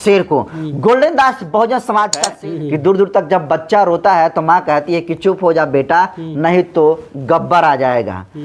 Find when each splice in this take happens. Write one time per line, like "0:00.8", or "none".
0:02.3